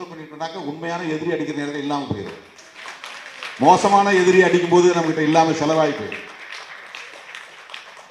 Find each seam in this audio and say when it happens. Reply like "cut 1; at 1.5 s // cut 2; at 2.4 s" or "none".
none